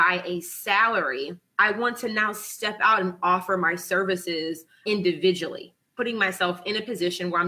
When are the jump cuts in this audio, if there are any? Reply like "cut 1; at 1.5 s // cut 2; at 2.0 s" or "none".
cut 1; at 1.4 s // cut 2; at 4.8 s // cut 3; at 5.9 s